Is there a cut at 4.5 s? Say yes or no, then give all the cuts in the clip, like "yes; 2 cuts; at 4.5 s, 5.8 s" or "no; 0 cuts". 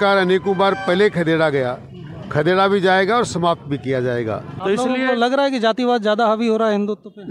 yes; 1 cut; at 4.5 s